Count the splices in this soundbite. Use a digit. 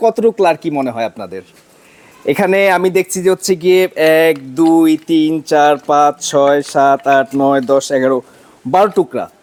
0